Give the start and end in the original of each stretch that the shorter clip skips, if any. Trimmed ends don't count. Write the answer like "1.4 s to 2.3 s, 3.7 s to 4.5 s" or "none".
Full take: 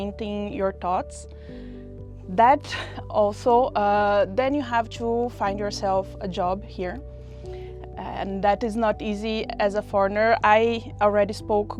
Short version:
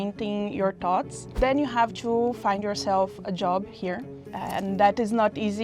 1.3 s to 4.3 s, 7.2 s to 7.8 s